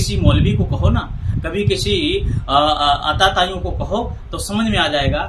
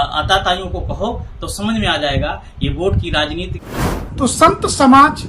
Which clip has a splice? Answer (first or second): second